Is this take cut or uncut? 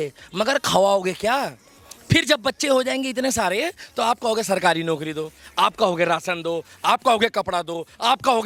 uncut